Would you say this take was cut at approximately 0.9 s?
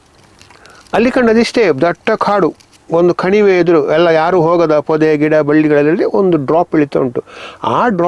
no; 0 cuts

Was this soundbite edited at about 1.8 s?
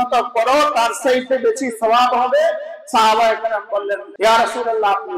no; 1 cut; at 4.1 s

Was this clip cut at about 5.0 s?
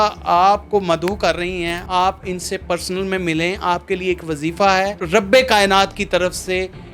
yes; 2 cuts; at 1.8 s, 5.0 s

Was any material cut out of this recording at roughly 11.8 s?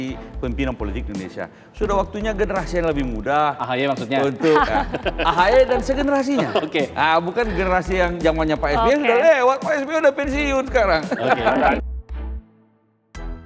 yes; 1 cut; at 11.8 s

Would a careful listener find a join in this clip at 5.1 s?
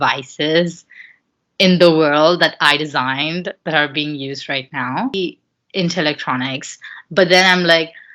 yes; 1 cut; at 5.1 s

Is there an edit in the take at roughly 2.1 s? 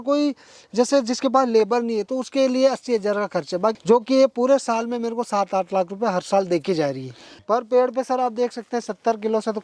no; 2 cuts; at 3.8 s, 7.4 s

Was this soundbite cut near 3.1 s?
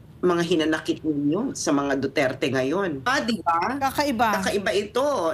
yes; 1 cut; at 3.1 s

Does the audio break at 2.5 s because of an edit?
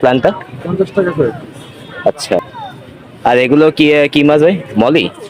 yes; 1 cut; at 2.5 s

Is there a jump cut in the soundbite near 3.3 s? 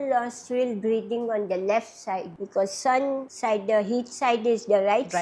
yes; 2 cuts; at 2.4 s, 3.3 s

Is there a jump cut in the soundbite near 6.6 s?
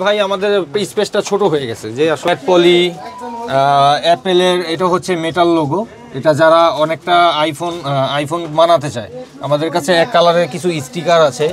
no; 1 cut; at 2.3 s

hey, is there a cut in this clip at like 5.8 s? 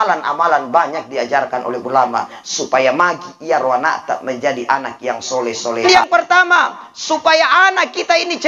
yes; 1 cut; at 5.8 s

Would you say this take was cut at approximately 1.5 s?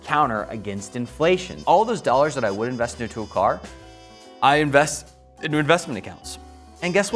yes; 1 cut; at 1.5 s

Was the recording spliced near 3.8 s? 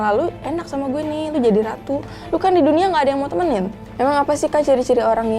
yes; 1 cut; at 3.8 s

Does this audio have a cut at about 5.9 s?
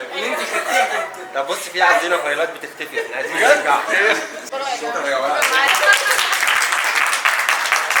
no; 1 cut; at 4.5 s

